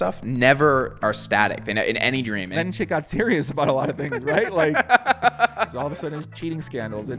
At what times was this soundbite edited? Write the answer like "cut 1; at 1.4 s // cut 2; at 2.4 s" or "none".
cut 1; at 2.5 s // cut 2; at 5.7 s